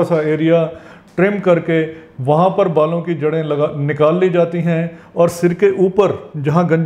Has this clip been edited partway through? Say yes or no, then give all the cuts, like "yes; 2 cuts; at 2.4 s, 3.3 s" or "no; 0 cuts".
no; 0 cuts